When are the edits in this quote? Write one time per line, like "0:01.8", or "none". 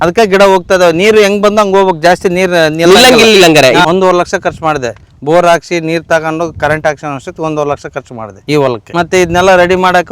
0:03.8